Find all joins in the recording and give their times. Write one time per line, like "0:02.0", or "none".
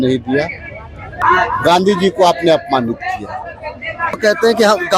0:01.0
0:04.2